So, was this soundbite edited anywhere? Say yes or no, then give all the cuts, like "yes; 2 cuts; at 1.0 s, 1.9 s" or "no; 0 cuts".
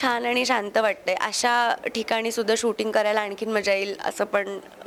no; 0 cuts